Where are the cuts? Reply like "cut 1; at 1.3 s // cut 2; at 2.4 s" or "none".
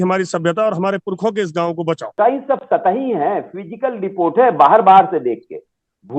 cut 1; at 2.2 s